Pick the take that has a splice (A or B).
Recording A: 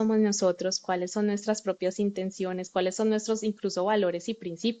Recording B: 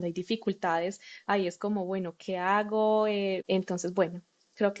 B